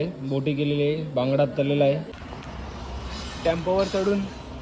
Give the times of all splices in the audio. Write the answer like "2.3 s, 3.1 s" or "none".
2.2 s